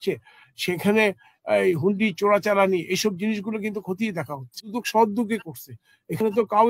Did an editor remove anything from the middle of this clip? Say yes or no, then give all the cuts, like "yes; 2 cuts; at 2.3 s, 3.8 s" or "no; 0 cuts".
yes; 1 cut; at 4.7 s